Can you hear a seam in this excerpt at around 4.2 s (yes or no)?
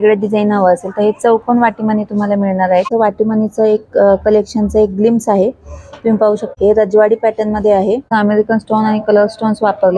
no